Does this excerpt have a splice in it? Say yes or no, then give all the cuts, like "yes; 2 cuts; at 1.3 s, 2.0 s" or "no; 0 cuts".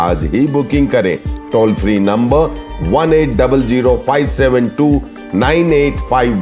no; 0 cuts